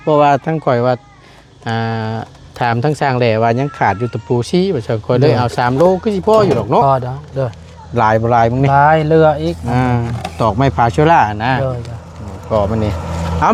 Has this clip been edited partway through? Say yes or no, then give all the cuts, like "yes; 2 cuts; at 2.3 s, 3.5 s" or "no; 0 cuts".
no; 0 cuts